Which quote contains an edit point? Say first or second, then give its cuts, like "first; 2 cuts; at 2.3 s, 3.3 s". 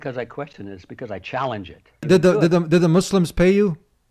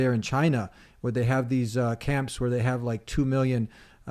first; 1 cut; at 2.1 s